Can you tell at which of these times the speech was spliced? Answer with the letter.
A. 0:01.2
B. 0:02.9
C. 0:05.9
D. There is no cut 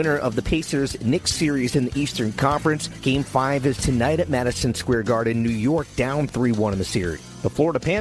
D